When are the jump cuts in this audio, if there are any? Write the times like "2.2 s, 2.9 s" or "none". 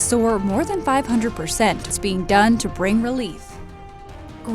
1.9 s